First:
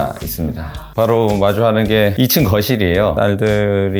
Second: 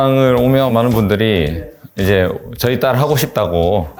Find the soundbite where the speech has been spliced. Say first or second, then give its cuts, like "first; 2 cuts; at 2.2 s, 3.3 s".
first; 3 cuts; at 0.9 s, 2.1 s, 3.1 s